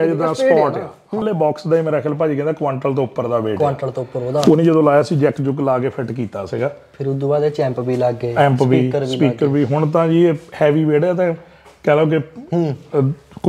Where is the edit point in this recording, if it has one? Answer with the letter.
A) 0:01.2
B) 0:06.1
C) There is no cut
A